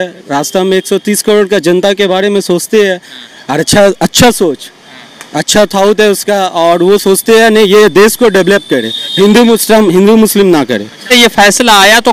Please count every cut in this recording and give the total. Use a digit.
1